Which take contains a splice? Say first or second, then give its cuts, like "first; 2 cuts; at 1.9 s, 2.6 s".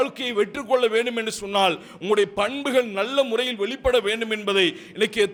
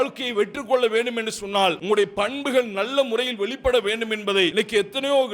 second; 2 cuts; at 1.8 s, 4.5 s